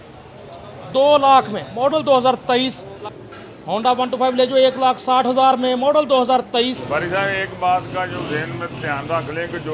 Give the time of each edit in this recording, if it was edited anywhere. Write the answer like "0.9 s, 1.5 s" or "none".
2.9 s, 6.8 s